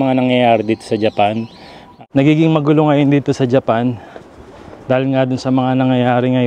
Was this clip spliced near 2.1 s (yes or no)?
yes